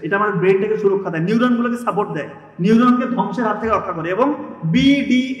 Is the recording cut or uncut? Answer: uncut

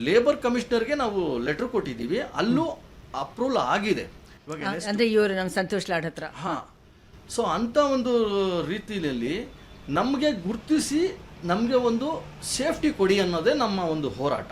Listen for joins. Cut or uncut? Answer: uncut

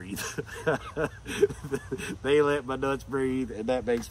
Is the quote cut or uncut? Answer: uncut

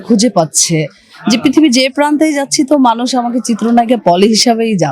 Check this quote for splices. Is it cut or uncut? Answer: uncut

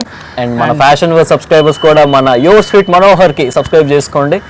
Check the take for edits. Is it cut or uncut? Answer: uncut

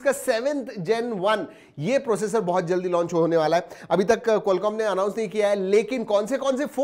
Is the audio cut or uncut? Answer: uncut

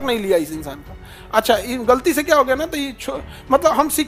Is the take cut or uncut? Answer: uncut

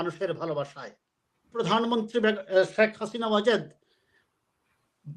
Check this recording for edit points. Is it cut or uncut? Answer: cut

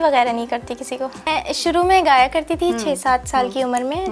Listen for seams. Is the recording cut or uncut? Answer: cut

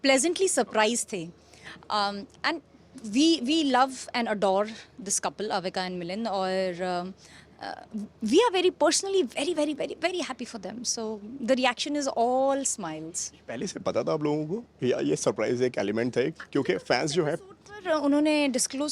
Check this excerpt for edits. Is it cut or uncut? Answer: uncut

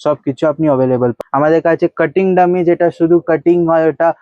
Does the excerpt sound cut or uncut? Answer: cut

